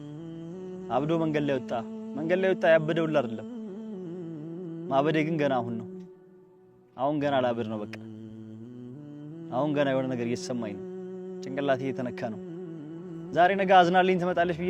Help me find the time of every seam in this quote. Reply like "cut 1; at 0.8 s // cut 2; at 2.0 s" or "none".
cut 1; at 0.9 s // cut 2; at 3.3 s // cut 3; at 4.9 s